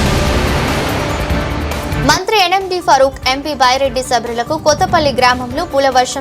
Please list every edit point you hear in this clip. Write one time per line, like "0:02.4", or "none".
0:01.9